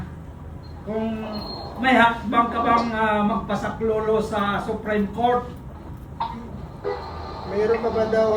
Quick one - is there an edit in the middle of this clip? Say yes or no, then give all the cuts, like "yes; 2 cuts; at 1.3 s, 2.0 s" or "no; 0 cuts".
no; 0 cuts